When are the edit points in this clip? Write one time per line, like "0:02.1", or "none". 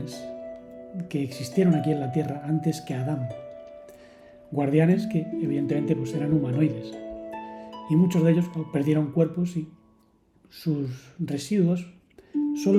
none

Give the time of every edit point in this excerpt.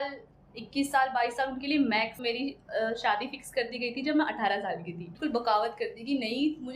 0:02.2
0:05.1

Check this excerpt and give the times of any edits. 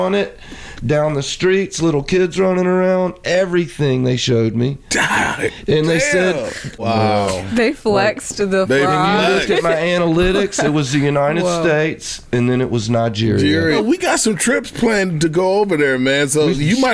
0:06.8
0:13.8

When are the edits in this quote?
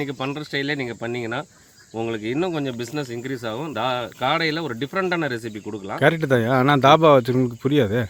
none

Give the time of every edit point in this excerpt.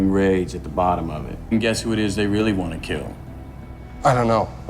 0:01.5

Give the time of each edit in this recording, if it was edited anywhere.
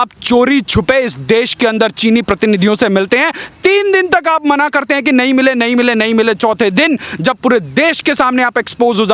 none

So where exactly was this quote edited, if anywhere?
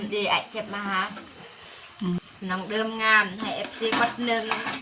0:02.2

